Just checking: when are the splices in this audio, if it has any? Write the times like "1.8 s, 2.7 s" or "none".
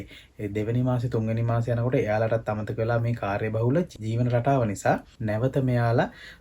3.9 s, 5.1 s